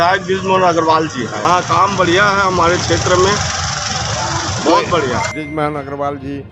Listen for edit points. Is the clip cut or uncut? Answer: cut